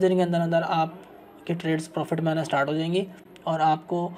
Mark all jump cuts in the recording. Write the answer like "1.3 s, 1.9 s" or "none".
none